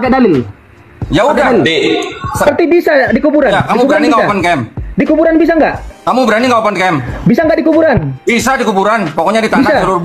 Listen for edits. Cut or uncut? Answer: cut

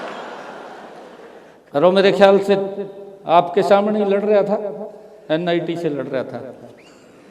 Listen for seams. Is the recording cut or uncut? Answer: cut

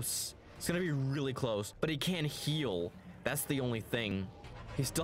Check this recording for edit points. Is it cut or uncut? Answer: cut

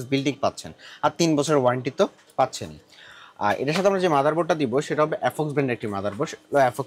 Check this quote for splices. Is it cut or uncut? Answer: uncut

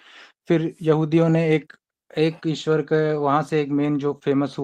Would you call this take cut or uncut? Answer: uncut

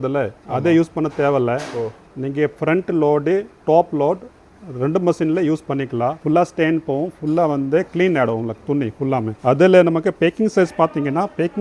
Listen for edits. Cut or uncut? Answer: uncut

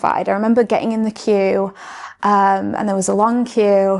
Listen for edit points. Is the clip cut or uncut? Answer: uncut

